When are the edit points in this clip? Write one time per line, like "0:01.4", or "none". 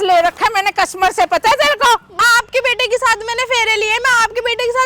0:02.2